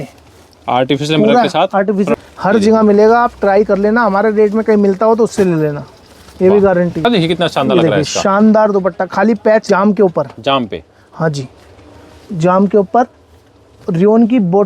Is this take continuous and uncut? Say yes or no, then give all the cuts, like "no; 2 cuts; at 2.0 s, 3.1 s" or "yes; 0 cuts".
no; 3 cuts; at 2.1 s, 7.0 s, 9.6 s